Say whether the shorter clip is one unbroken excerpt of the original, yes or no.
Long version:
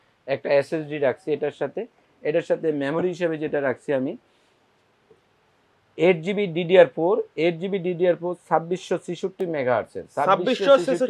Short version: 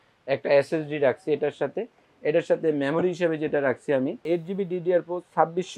no